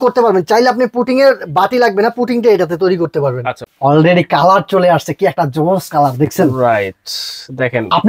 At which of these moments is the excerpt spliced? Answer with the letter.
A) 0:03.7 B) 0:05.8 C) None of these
A